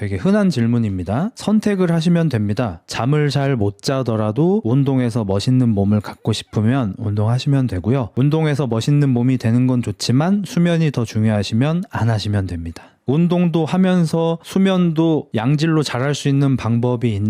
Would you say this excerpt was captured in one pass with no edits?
yes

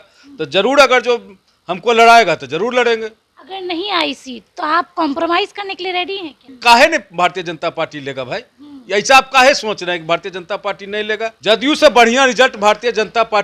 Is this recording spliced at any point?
yes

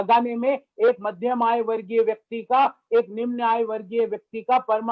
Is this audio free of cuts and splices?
yes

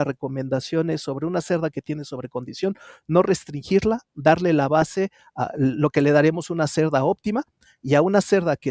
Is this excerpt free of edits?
yes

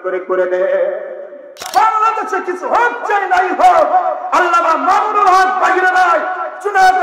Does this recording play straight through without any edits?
no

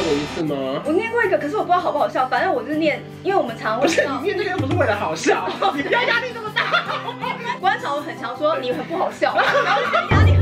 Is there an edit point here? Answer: no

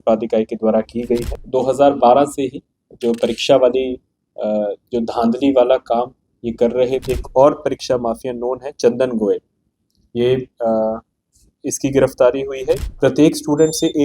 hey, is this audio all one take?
no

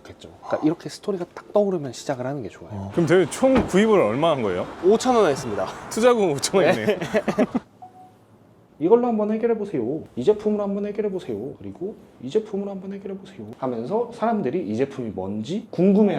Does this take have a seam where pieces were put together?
yes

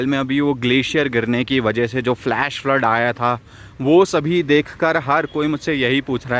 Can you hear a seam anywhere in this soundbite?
no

